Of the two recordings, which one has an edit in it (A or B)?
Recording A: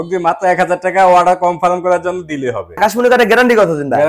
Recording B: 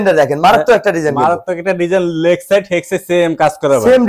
A